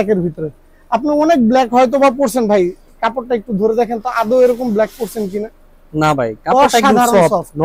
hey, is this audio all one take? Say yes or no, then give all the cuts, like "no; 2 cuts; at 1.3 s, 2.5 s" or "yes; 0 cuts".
yes; 0 cuts